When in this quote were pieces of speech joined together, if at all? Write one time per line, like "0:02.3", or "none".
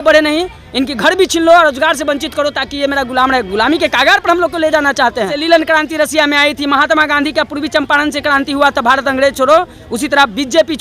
0:05.4